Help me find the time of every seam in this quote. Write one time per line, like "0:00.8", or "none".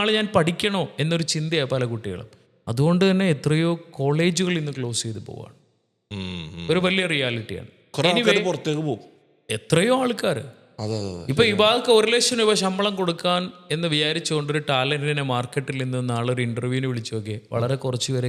none